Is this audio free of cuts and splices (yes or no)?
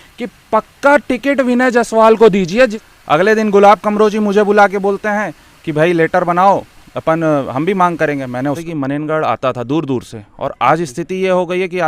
no